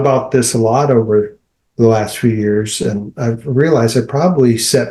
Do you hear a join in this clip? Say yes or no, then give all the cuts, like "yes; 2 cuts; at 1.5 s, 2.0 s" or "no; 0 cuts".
no; 0 cuts